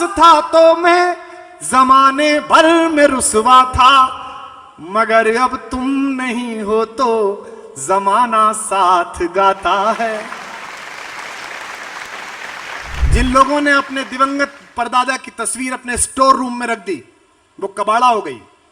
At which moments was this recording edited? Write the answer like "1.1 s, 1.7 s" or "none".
12.9 s